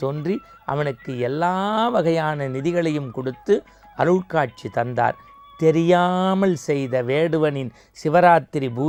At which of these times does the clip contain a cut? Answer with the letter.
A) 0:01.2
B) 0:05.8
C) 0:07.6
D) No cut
D